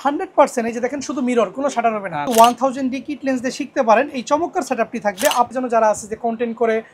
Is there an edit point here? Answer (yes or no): yes